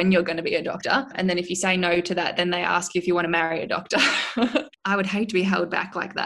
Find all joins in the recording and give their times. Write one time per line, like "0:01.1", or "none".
0:01.1
0:04.5